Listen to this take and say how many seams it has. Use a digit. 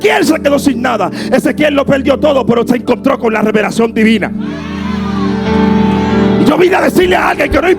0